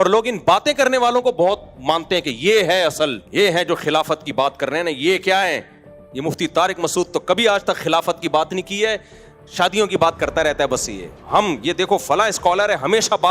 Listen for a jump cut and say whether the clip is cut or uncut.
cut